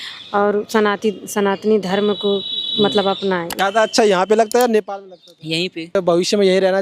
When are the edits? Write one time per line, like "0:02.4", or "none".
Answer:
0:03.5
0:05.9